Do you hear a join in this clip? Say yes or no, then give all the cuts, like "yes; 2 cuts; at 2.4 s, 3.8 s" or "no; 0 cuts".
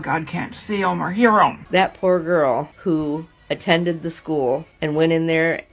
yes; 3 cuts; at 1.6 s, 2.7 s, 4.7 s